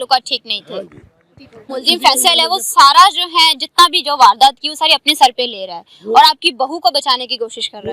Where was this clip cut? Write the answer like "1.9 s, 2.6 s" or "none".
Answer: 1.8 s